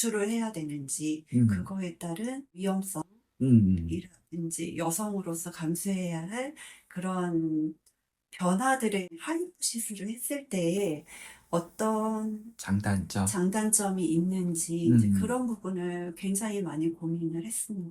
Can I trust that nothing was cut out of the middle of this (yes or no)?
no